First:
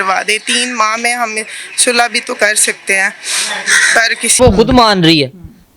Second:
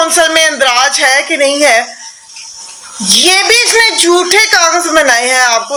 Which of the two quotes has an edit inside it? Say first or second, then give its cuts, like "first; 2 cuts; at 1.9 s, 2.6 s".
first; 1 cut; at 4.4 s